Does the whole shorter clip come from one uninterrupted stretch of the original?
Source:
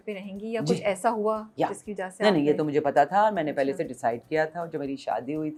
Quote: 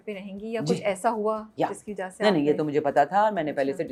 yes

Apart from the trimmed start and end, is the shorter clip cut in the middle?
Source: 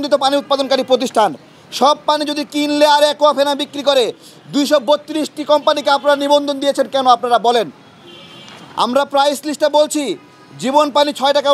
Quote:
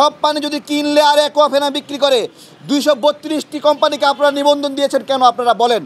no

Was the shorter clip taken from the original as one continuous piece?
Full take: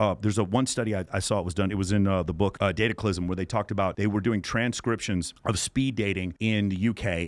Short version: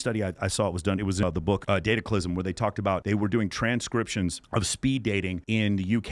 no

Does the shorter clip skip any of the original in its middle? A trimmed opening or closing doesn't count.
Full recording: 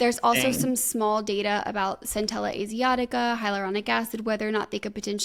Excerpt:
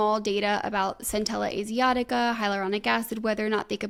no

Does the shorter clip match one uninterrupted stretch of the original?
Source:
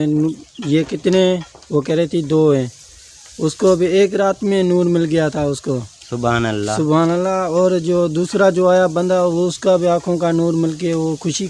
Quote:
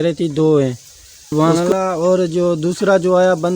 no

